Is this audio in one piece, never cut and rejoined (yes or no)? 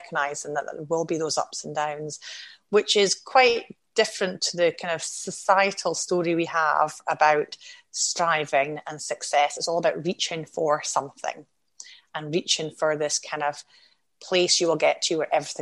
yes